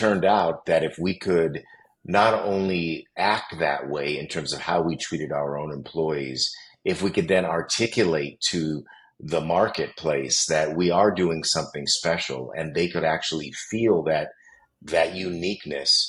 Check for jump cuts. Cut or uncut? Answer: uncut